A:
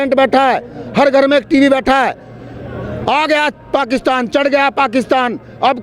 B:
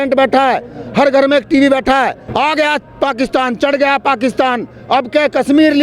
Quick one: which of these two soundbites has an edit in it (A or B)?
B